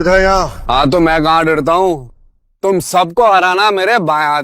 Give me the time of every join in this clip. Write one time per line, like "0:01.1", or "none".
0:02.4